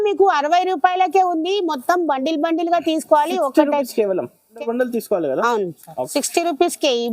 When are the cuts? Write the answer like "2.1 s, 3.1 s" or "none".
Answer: 4.6 s, 6.1 s